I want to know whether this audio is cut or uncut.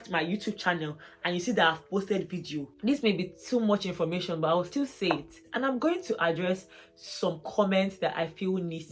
cut